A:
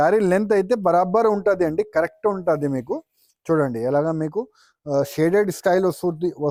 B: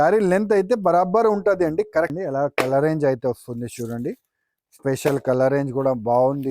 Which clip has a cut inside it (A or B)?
B